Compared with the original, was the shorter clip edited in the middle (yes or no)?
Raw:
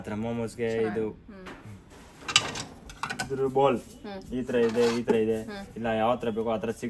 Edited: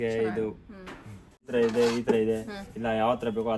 yes